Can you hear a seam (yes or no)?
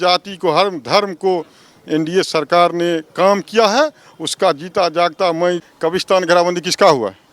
yes